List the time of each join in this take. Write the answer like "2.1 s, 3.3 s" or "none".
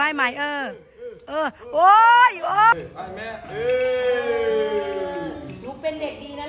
2.7 s

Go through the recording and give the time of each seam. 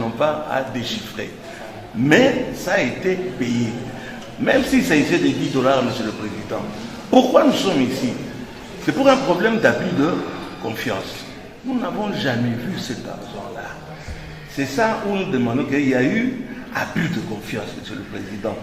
11.4 s

